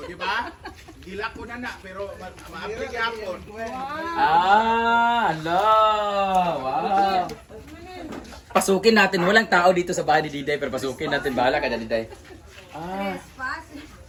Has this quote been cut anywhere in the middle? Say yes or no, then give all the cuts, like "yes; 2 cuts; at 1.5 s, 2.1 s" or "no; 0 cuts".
no; 0 cuts